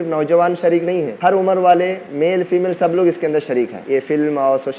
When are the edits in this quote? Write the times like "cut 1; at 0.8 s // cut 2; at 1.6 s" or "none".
cut 1; at 1.1 s // cut 2; at 2.0 s // cut 3; at 3.8 s